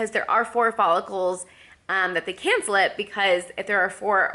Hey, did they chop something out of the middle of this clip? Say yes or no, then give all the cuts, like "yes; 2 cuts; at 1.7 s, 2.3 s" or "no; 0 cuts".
no; 0 cuts